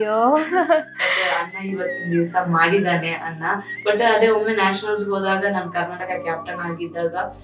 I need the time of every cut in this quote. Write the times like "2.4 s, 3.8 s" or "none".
3.8 s